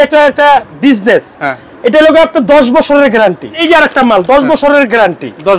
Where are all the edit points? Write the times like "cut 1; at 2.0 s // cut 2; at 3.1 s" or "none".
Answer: cut 1; at 3.6 s